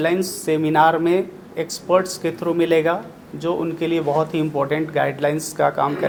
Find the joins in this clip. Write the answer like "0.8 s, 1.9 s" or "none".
none